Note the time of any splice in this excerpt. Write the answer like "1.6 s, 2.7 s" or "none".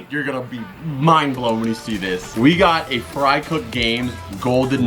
2.3 s